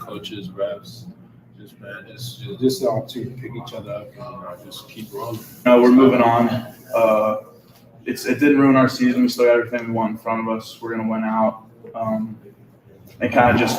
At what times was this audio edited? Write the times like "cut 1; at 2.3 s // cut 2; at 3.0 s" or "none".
cut 1; at 5.5 s